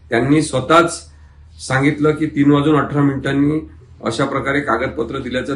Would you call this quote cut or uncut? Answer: uncut